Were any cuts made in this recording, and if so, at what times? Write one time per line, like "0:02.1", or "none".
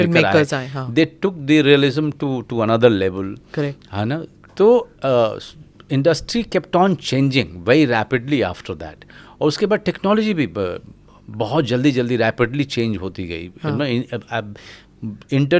none